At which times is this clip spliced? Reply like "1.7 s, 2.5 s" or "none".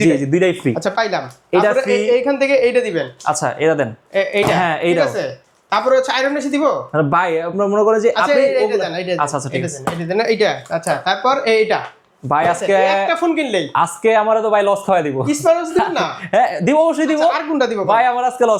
none